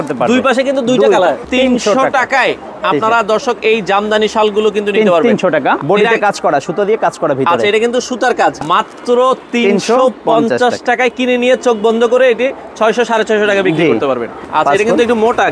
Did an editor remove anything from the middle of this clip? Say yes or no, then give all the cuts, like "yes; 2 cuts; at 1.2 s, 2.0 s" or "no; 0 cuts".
yes; 4 cuts; at 1.4 s, 5.8 s, 8.6 s, 14.4 s